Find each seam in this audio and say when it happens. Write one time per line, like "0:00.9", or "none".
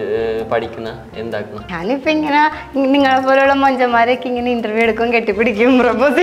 0:01.6